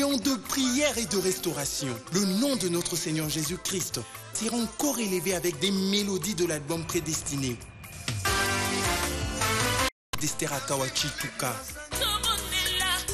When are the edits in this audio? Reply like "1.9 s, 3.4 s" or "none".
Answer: 10.1 s